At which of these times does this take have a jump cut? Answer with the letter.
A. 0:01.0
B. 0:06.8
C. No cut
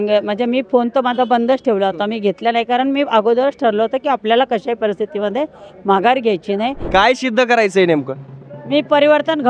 B